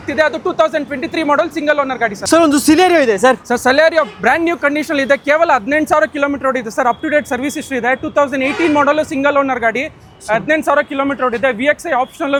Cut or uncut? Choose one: uncut